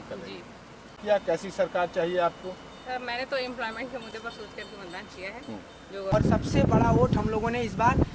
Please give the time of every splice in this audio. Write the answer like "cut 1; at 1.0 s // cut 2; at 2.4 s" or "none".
cut 1; at 0.9 s // cut 2; at 6.1 s